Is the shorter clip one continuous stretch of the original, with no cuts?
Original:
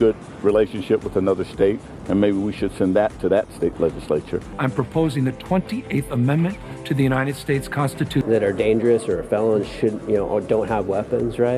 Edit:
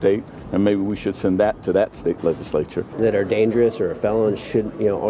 no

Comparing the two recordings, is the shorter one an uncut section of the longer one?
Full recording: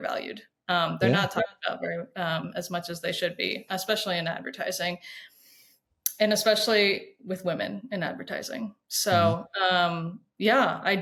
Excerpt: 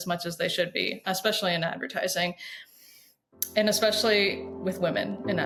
yes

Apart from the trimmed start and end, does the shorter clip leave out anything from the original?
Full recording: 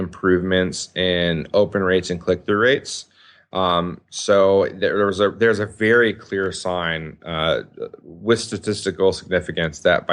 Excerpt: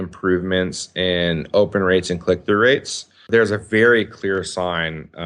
yes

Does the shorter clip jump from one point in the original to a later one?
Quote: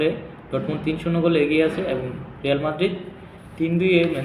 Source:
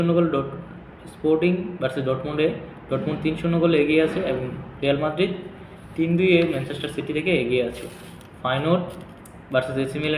no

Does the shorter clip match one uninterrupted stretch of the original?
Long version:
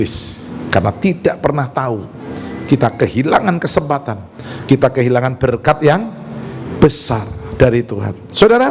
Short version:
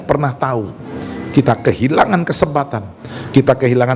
yes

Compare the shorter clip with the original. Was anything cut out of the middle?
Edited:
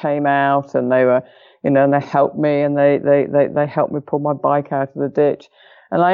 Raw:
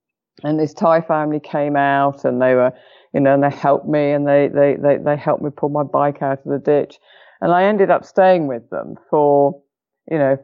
no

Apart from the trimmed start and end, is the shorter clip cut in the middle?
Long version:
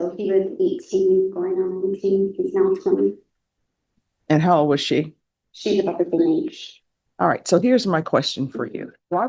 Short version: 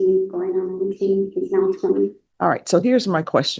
yes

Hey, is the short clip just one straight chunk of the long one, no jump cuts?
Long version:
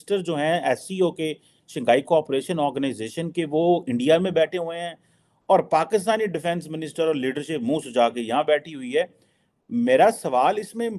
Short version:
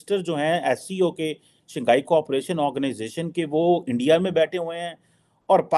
yes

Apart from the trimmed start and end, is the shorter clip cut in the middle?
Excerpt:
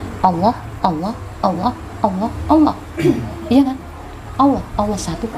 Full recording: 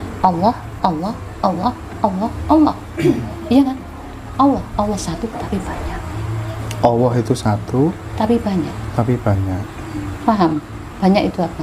no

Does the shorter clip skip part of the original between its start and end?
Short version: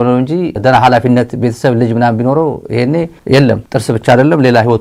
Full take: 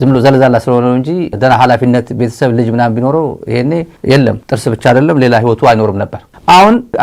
no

